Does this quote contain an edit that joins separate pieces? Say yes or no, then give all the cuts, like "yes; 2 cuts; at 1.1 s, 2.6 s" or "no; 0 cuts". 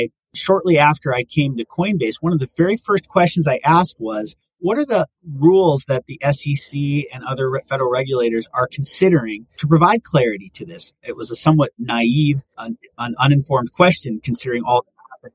no; 0 cuts